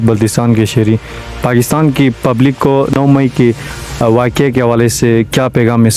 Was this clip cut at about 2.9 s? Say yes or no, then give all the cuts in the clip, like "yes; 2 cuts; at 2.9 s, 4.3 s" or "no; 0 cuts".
yes; 1 cut; at 2.9 s